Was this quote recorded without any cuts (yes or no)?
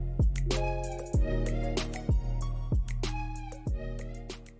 yes